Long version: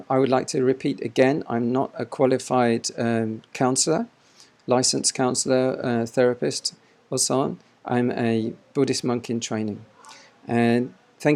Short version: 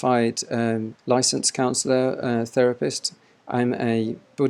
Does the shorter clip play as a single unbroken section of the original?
no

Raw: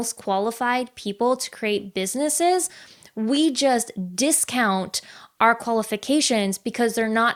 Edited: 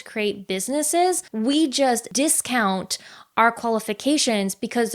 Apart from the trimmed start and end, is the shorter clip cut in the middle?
yes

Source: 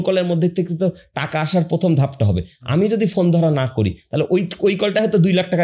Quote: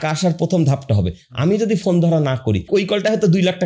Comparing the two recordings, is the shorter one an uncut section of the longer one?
no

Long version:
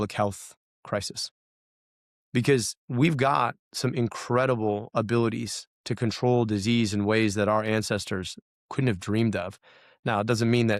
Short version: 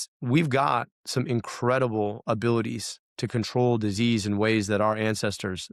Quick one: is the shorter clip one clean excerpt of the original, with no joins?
yes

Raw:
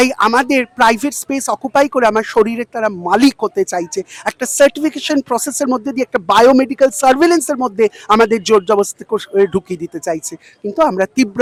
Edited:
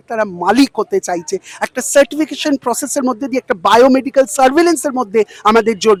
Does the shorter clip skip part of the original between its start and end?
no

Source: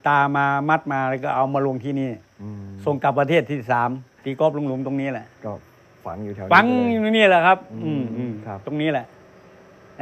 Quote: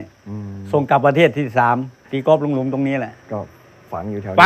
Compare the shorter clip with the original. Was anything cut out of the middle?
no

